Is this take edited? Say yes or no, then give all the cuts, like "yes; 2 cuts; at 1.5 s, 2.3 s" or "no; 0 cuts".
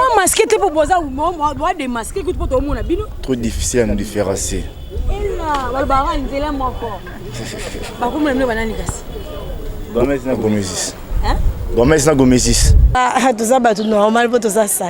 yes; 1 cut; at 13.0 s